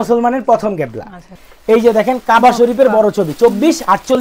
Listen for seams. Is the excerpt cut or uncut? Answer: cut